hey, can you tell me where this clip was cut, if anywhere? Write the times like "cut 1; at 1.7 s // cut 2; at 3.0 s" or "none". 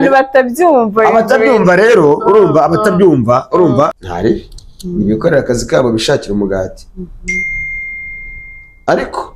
cut 1; at 4.0 s

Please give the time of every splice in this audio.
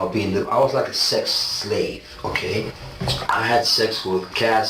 cut 1; at 2.8 s

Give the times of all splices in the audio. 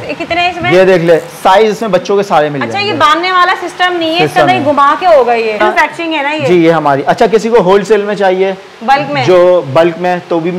cut 1; at 5.6 s

